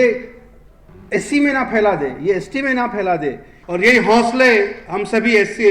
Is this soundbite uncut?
no; 1 cut; at 3.7 s

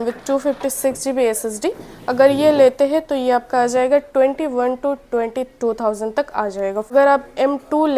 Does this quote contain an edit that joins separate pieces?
yes; 1 cut; at 6.9 s

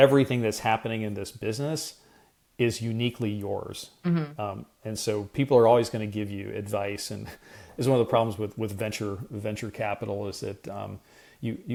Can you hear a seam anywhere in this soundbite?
no; 0 cuts

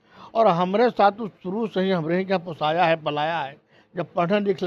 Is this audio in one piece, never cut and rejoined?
yes; 0 cuts

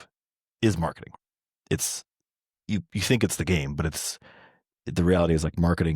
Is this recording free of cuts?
no; 1 cut; at 1.1 s

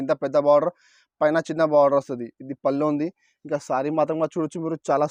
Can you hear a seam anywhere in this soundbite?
no; 0 cuts

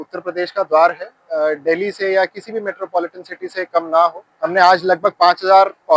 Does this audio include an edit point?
yes; 2 cuts; at 1.1 s, 4.3 s

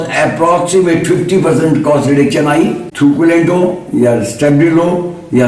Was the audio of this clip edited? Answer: yes; 1 cut; at 2.8 s

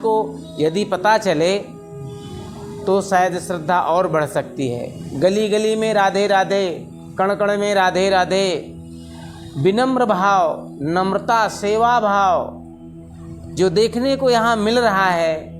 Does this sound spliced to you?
no; 0 cuts

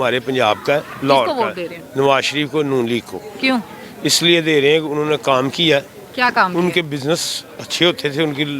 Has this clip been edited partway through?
no; 0 cuts

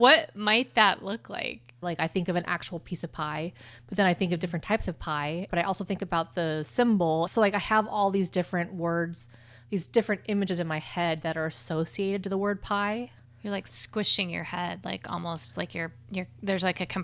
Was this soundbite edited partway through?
yes; 4 cuts; at 1.8 s, 5.5 s, 7.3 s, 13.2 s

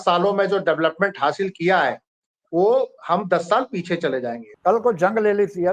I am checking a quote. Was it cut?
yes; 1 cut; at 4.4 s

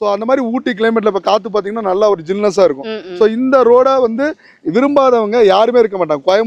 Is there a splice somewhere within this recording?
no; 0 cuts

